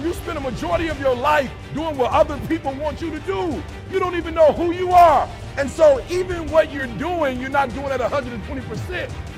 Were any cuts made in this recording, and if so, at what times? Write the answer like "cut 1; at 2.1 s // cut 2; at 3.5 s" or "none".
none